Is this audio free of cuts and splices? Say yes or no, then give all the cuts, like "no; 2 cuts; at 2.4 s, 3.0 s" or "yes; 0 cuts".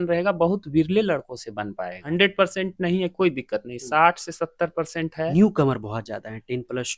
no; 2 cuts; at 2.0 s, 5.3 s